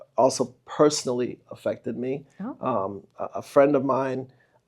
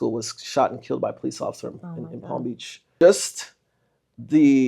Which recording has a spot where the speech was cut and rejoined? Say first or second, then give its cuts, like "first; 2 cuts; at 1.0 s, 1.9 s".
second; 1 cut; at 2.9 s